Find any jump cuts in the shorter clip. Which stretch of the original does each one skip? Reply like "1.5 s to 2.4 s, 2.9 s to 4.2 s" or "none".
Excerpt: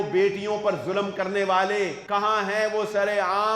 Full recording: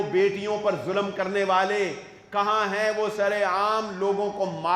2.0 s to 2.2 s

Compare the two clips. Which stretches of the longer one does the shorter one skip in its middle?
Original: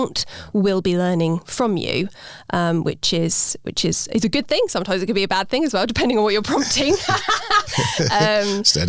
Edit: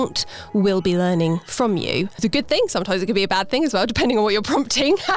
2.2 s to 4.2 s

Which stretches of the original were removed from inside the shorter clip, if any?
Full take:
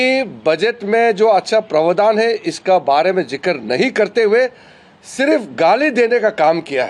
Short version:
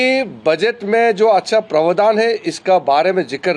none

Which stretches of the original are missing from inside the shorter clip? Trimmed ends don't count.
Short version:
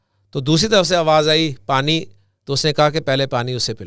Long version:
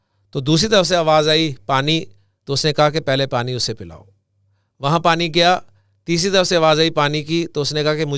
none

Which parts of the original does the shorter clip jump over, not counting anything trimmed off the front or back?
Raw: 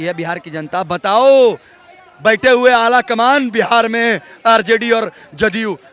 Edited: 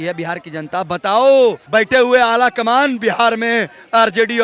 1.6 s to 2.1 s

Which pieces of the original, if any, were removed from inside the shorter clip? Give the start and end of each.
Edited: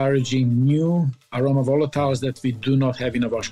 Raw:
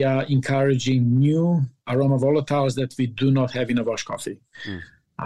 none

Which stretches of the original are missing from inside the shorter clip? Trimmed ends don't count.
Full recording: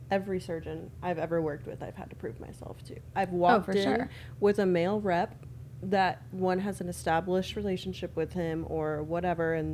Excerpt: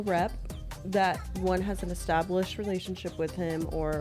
none

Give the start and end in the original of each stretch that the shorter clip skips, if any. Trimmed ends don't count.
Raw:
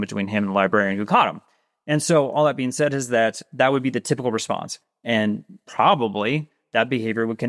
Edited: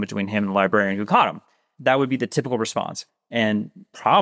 1.7 s to 3.4 s

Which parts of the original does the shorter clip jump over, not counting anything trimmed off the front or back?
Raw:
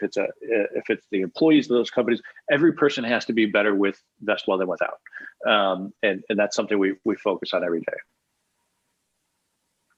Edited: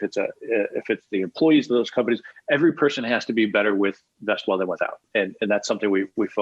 5.0 s to 5.9 s

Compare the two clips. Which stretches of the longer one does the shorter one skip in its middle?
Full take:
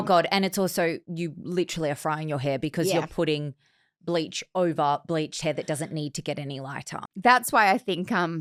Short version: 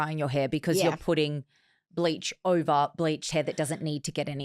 none

